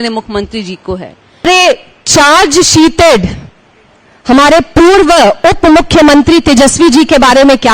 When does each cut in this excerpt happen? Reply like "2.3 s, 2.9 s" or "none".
1.5 s